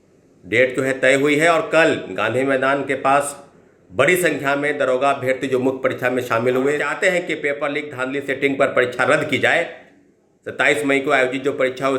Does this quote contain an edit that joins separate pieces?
yes; 1 cut; at 6.9 s

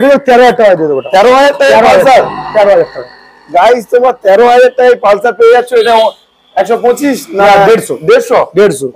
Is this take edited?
no; 0 cuts

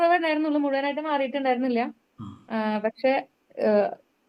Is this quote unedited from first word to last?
yes; 0 cuts

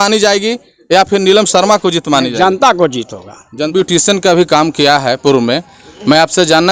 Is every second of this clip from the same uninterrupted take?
no; 1 cut; at 3.7 s

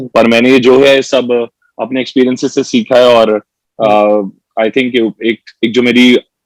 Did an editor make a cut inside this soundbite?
no; 0 cuts

